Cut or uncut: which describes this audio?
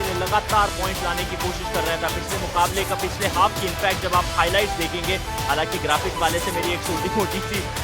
uncut